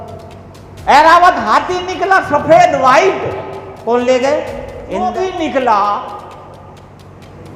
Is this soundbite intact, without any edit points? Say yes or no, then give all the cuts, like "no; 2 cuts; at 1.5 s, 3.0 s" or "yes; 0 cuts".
no; 1 cut; at 5.1 s